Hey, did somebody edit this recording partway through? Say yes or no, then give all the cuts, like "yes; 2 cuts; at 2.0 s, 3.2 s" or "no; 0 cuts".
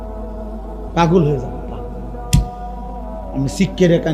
yes; 1 cut; at 0.9 s